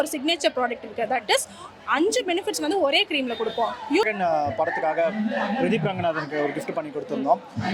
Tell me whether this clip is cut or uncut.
cut